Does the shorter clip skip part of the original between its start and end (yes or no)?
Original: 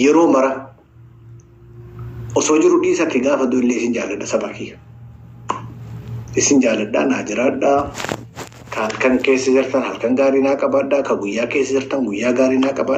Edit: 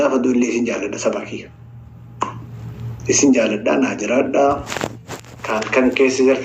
no